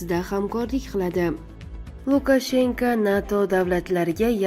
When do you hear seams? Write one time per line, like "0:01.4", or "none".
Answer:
0:01.7